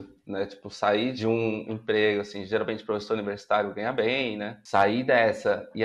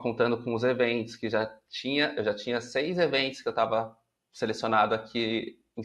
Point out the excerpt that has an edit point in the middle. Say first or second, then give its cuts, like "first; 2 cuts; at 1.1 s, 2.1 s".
first; 2 cuts; at 1.1 s, 4.5 s